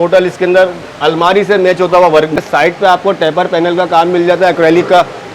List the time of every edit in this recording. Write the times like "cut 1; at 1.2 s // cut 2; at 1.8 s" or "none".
cut 1; at 2.4 s